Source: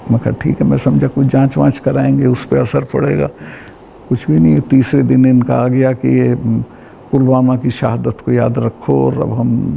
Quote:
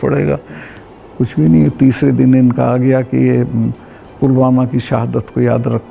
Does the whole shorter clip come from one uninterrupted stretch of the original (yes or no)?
yes